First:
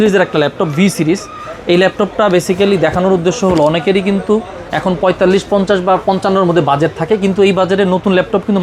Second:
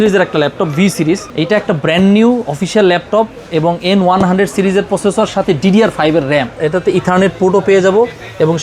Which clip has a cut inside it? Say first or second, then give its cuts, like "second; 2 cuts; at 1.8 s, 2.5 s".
second; 2 cuts; at 1.3 s, 6.5 s